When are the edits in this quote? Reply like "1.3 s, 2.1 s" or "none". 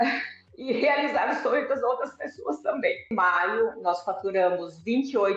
3.1 s